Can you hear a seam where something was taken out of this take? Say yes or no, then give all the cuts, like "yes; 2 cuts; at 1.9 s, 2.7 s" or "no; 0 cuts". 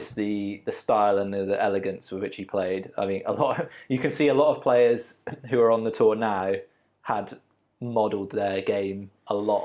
no; 0 cuts